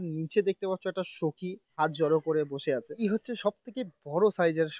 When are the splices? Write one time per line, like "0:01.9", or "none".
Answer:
0:01.7
0:02.9

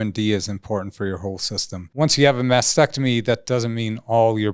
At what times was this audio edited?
0:01.8

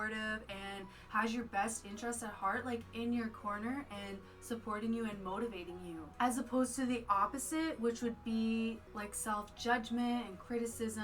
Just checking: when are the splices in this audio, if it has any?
none

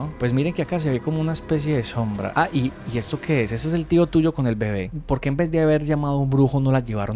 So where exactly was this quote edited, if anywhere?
0:04.9

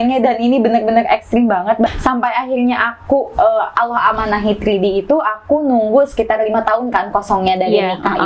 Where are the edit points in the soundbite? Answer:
0:01.9

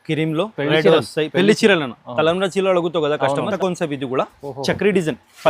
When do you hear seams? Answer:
0:03.5

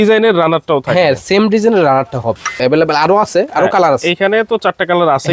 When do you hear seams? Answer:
none

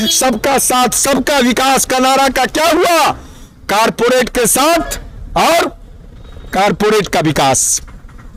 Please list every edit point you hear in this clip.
none

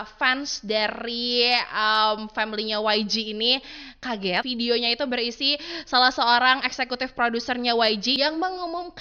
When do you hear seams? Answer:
0:04.5
0:08.1

